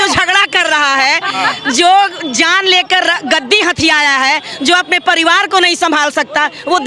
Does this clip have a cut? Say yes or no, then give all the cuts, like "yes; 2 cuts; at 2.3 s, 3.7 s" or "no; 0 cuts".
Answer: no; 0 cuts